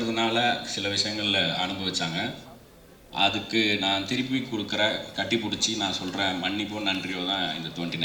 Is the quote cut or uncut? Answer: uncut